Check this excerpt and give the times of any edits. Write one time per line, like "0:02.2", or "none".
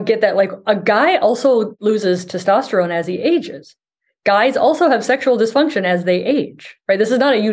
0:01.8